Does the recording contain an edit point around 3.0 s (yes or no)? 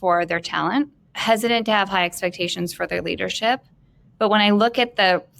no